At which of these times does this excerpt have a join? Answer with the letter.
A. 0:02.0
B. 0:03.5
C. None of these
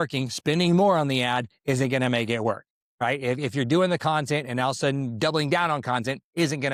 C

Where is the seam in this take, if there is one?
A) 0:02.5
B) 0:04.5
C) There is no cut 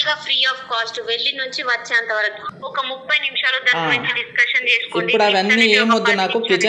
A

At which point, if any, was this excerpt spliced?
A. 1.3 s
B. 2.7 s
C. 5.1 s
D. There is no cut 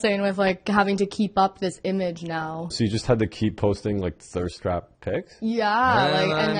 B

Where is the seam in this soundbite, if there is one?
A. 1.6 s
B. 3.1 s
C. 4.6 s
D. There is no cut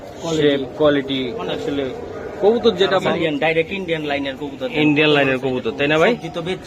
B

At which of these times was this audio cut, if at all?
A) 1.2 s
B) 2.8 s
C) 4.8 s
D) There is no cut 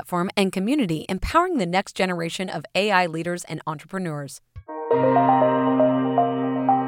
C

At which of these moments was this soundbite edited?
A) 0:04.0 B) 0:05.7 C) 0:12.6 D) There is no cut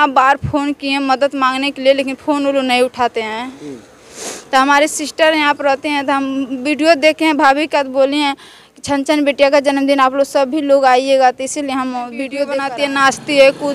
C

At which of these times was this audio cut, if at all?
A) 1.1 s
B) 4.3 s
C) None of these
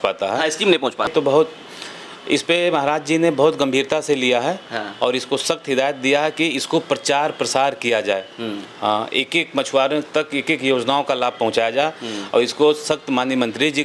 A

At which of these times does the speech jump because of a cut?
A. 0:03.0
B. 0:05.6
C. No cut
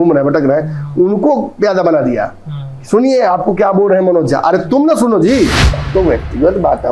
B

